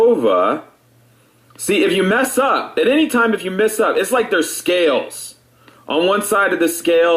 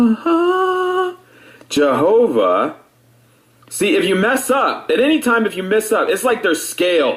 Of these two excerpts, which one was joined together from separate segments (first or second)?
first